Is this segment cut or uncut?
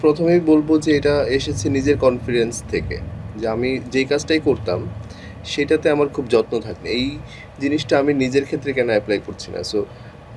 cut